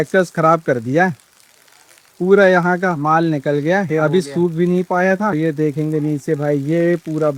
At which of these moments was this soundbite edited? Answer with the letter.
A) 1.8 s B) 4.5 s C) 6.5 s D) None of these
D